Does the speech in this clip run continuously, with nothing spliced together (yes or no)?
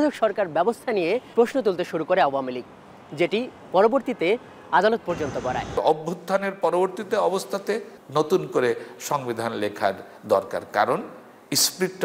no